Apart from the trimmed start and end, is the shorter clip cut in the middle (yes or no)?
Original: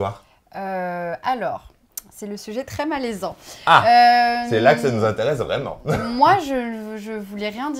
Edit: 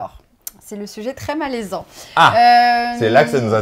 no